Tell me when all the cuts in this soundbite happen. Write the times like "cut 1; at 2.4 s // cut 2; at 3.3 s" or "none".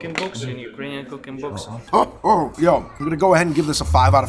cut 1; at 2.2 s